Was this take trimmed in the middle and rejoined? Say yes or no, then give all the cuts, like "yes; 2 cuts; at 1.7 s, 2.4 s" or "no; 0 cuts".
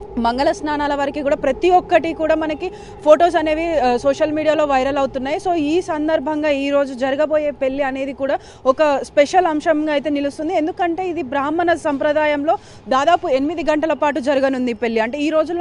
no; 0 cuts